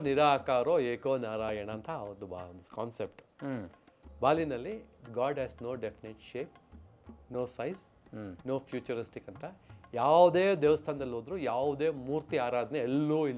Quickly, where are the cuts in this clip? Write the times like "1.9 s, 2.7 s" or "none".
none